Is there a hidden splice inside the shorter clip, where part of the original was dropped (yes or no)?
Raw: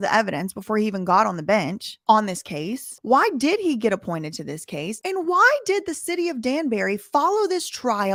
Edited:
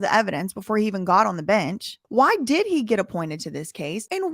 yes